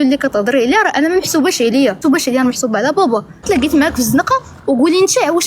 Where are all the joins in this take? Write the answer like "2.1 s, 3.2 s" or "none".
2.0 s, 3.4 s